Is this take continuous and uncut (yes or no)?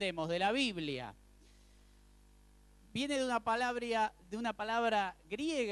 yes